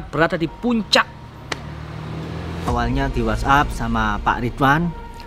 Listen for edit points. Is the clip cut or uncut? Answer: cut